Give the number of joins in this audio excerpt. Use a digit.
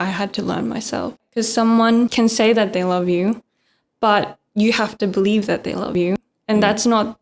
2